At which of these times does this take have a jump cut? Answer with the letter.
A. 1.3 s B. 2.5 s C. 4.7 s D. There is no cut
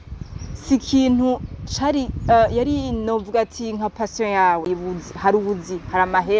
C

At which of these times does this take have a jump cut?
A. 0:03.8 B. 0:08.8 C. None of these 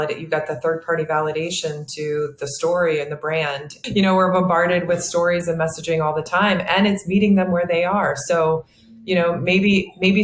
A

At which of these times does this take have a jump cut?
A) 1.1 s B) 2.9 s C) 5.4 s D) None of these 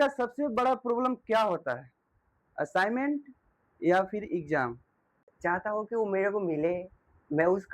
C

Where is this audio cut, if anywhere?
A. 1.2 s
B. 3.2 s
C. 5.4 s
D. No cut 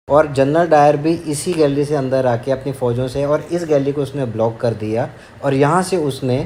D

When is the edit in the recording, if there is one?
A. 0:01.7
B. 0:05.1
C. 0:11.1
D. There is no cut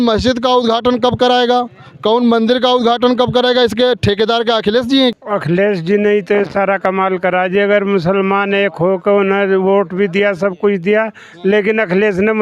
B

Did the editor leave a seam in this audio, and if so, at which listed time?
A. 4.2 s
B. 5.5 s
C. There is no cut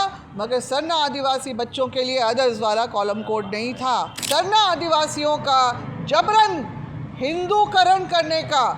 A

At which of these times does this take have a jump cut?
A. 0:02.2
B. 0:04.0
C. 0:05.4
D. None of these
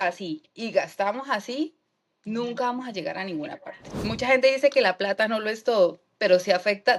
B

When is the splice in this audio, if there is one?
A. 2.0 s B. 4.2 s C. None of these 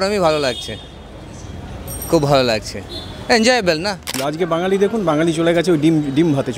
B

